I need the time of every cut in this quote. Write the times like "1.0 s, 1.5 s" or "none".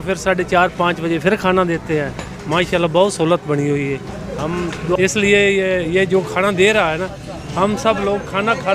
5.0 s

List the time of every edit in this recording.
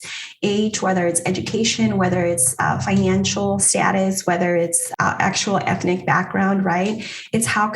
3.7 s, 4.8 s

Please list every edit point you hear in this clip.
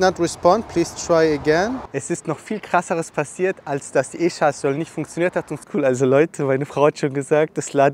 1.9 s, 5.5 s

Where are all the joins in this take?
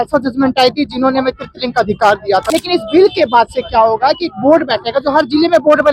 2.5 s

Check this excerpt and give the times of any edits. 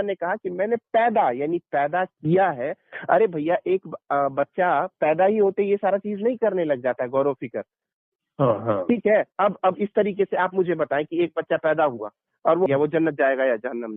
12.7 s

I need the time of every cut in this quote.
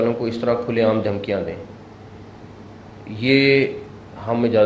none

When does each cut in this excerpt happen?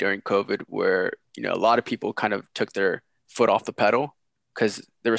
none

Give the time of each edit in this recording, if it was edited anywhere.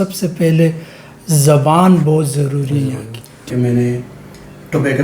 3.5 s

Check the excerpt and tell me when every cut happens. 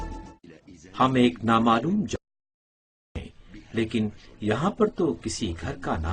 none

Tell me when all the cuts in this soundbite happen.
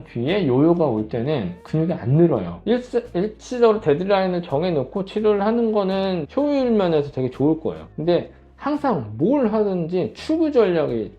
2.5 s, 6.2 s, 7.9 s

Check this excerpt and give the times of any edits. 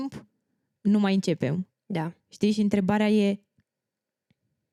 none

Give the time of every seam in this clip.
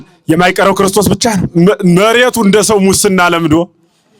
1.5 s

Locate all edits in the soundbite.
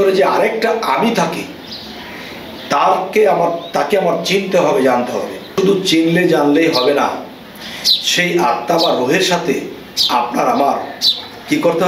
5.5 s

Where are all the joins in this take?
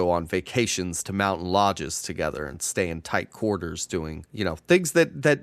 4.2 s

